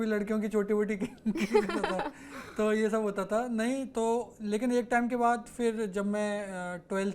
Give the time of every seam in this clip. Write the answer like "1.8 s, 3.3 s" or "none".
none